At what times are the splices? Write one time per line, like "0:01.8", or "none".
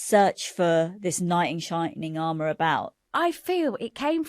0:03.1